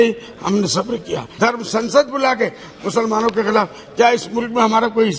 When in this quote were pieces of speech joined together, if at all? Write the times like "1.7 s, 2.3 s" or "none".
1.2 s

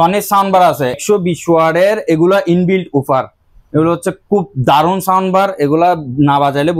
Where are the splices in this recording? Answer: 1.0 s

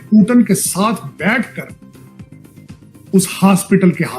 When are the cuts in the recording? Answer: 1.7 s, 3.1 s

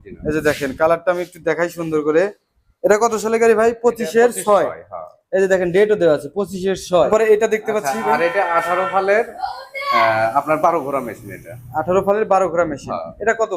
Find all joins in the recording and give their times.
7.1 s

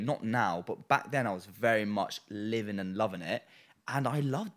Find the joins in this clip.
none

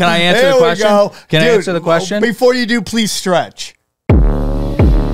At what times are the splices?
3.9 s

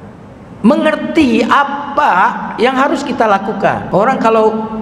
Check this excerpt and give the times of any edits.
3.8 s

